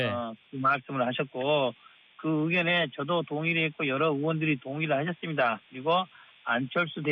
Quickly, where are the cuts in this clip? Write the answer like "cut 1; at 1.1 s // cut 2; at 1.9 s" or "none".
cut 1; at 5.1 s